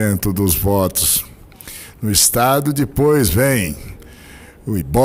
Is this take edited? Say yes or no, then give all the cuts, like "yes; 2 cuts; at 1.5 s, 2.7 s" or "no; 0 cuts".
no; 0 cuts